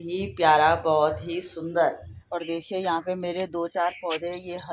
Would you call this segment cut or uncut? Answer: cut